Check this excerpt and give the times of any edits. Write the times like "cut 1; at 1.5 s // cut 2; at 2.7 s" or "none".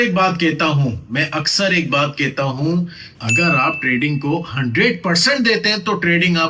none